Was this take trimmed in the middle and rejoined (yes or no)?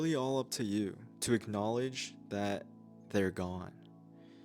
yes